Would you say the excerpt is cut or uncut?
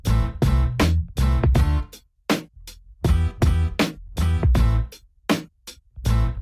uncut